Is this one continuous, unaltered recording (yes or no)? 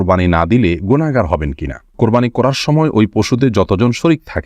no